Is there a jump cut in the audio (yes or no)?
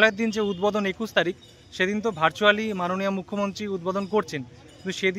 no